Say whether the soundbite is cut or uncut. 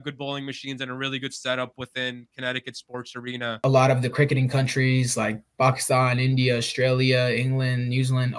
cut